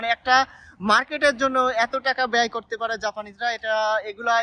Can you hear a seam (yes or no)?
no